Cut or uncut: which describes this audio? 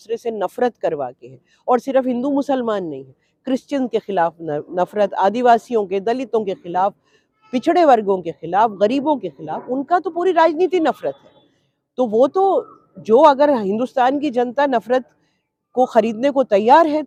uncut